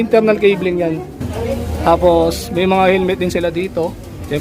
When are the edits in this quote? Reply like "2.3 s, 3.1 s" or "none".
1.3 s